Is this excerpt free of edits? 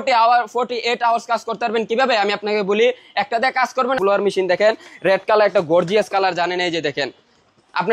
no; 1 cut; at 4.0 s

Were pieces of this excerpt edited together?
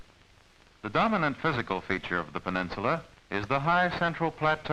no; 0 cuts

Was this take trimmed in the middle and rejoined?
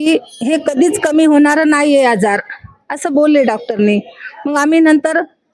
no; 0 cuts

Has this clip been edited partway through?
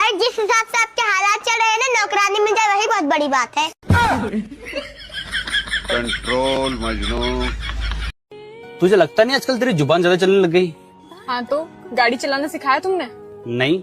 yes; 1 cut; at 8.3 s

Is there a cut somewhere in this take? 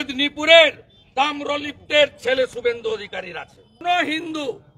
yes; 1 cut; at 3.8 s

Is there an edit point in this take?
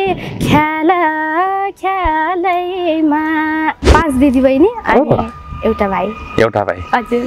yes; 1 cut; at 3.9 s

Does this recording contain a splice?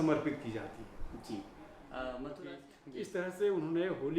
yes; 1 cut; at 2.4 s

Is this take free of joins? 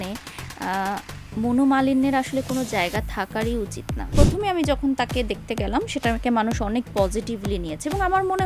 no; 1 cut; at 4.0 s

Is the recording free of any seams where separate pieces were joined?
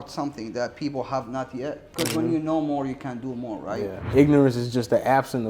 no; 2 cuts; at 1.9 s, 4.1 s

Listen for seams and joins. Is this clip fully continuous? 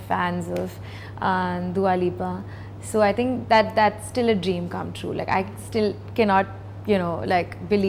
yes; 0 cuts

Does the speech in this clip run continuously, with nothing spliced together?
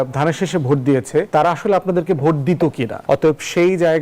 no; 2 cuts; at 1.3 s, 2.9 s

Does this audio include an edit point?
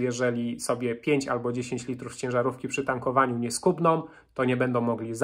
no; 0 cuts

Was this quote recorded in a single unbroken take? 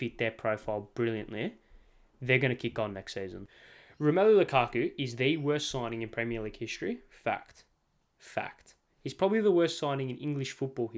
no; 1 cut; at 3.5 s

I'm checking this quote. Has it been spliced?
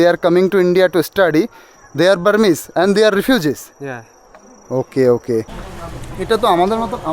yes; 1 cut; at 5.6 s

